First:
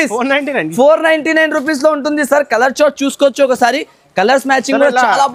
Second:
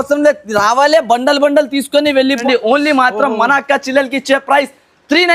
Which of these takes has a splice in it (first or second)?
second